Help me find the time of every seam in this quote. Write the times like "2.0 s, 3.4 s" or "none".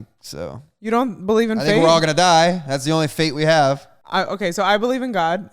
3.9 s